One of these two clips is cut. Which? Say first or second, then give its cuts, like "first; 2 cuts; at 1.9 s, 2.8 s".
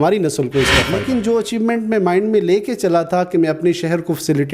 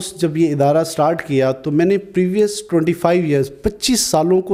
first; 1 cut; at 0.9 s